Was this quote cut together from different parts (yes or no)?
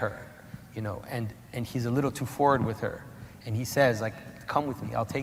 no